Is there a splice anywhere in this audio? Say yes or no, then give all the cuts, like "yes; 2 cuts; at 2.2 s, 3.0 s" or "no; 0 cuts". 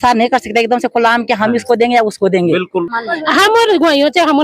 yes; 1 cut; at 3.0 s